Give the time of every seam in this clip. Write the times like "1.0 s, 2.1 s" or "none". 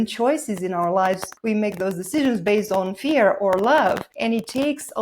1.3 s, 4.1 s